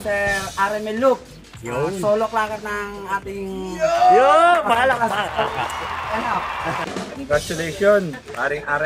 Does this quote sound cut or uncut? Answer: cut